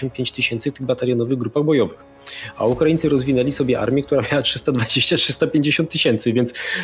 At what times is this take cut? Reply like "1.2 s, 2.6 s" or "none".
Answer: none